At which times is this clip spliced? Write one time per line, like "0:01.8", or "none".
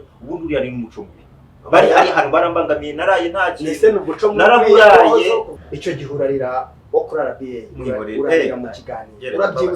0:05.5